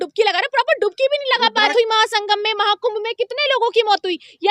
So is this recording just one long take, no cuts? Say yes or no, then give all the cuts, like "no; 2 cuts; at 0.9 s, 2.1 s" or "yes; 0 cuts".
no; 1 cut; at 1.7 s